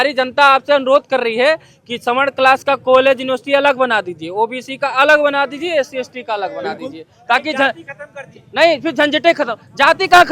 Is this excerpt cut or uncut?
uncut